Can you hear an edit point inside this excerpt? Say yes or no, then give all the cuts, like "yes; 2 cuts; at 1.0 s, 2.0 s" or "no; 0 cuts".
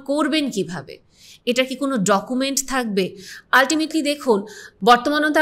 no; 0 cuts